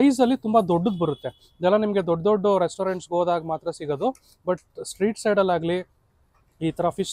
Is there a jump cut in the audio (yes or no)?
no